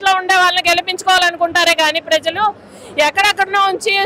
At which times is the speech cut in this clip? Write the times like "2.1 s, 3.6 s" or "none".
none